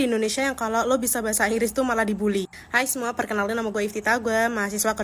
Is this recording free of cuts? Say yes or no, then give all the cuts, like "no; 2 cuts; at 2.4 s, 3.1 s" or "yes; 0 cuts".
yes; 0 cuts